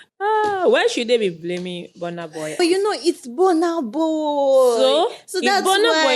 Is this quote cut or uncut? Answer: cut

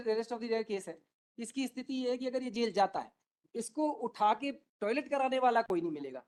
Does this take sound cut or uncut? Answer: uncut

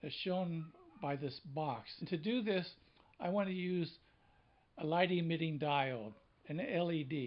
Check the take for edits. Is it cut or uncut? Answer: uncut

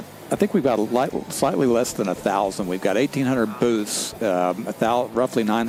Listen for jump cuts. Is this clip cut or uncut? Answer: uncut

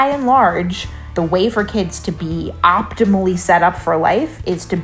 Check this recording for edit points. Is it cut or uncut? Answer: cut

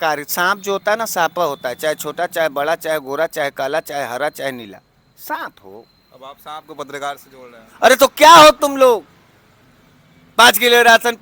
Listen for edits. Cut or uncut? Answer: uncut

